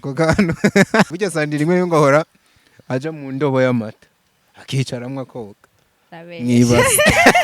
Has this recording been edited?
yes; 1 cut; at 1.1 s

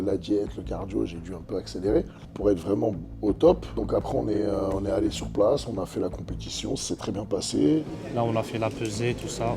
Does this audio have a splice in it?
yes; 3 cuts; at 2.2 s, 3.7 s, 7.8 s

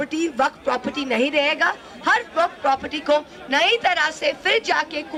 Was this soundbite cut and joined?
no; 0 cuts

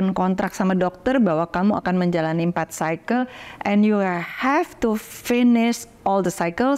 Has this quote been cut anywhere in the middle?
no; 0 cuts

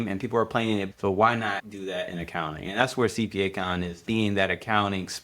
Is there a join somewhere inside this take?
yes; 3 cuts; at 0.9 s, 1.7 s, 4.0 s

